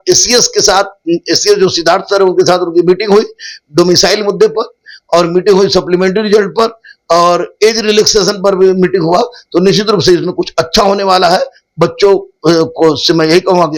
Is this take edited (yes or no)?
no